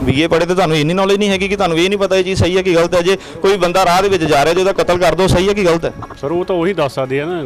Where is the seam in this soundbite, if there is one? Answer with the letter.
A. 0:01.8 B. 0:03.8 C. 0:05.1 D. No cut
D